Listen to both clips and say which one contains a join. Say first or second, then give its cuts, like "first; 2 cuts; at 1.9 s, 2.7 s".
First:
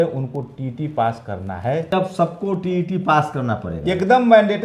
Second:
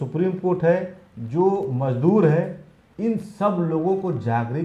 first; 1 cut; at 1.9 s